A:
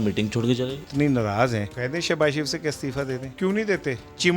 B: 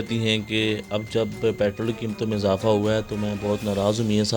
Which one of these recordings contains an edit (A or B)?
A